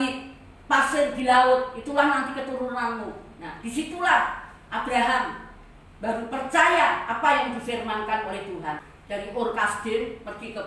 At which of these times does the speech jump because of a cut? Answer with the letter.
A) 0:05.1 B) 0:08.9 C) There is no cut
B